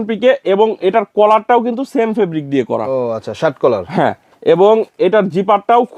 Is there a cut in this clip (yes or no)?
no